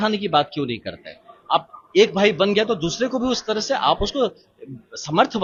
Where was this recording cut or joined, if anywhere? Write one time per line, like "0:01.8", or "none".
none

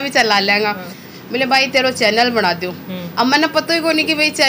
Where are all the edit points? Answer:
0:01.1

